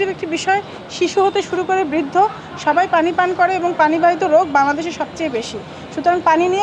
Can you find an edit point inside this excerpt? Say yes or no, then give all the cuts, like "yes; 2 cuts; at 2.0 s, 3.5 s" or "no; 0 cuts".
no; 0 cuts